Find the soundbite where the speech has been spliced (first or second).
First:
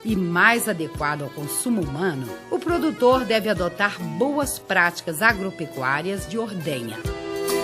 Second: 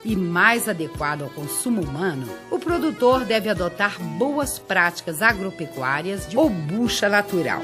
first